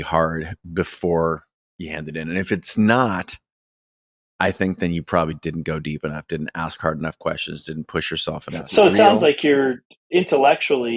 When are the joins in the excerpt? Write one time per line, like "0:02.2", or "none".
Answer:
0:08.6